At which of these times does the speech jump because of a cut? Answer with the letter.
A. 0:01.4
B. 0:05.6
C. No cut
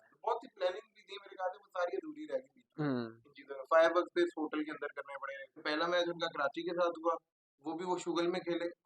B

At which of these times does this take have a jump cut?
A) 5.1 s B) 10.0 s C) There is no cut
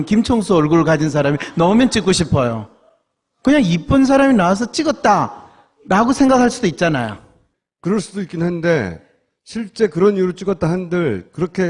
B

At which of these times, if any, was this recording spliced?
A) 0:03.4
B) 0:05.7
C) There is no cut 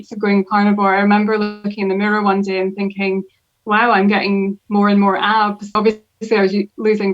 B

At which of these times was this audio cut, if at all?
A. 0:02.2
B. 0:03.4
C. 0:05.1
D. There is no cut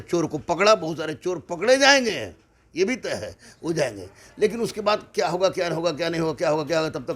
D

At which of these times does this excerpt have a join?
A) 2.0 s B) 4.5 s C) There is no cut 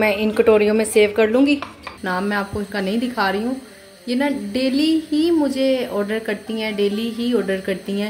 A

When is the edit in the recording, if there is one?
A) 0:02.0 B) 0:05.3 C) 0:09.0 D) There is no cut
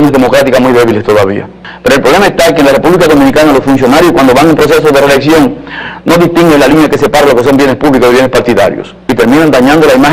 B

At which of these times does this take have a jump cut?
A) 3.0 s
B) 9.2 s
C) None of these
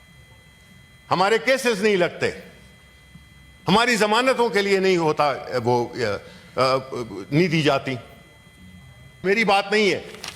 B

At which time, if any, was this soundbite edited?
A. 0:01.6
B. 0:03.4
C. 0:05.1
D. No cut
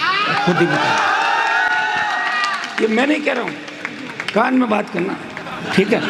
D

